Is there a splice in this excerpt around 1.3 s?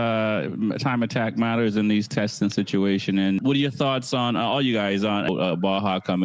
no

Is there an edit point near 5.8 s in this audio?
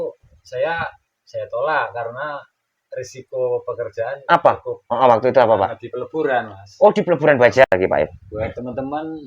no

